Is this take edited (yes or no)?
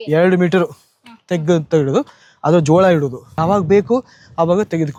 no